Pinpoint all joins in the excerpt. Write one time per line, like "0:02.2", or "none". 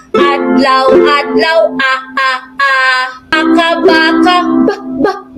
0:03.3